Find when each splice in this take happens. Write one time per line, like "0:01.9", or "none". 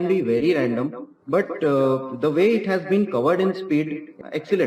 none